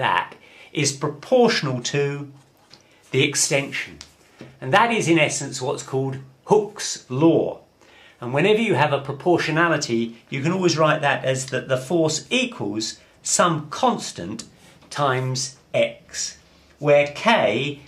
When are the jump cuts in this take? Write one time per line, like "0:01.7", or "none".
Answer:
0:12.9